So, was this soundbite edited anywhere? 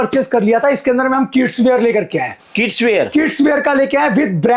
no; 0 cuts

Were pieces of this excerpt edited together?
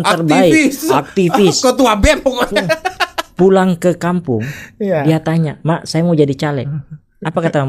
no; 0 cuts

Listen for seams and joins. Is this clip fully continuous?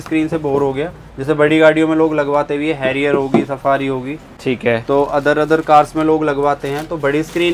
yes; 0 cuts

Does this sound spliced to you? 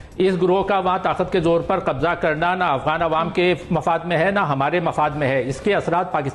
no; 0 cuts

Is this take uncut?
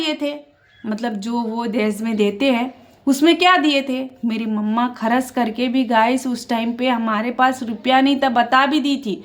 yes; 0 cuts

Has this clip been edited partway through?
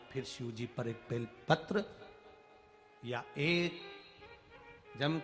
no; 0 cuts

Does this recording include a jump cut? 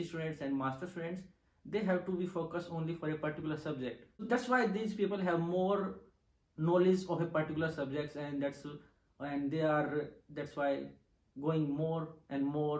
yes; 1 cut; at 4.2 s

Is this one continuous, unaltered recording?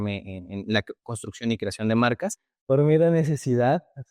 no; 1 cut; at 2.5 s

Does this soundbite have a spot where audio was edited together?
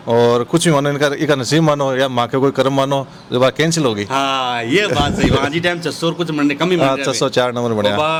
no; 0 cuts

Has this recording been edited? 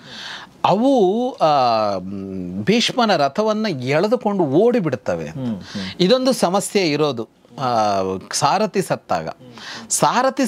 no; 0 cuts

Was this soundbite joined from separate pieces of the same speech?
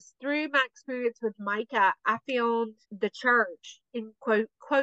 yes; 1 cut; at 2.8 s

